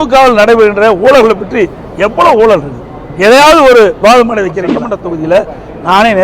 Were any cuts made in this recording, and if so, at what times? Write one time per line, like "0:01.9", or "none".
0:04.3